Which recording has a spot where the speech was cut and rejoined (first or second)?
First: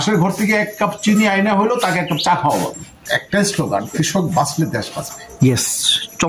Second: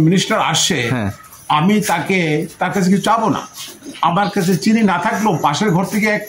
first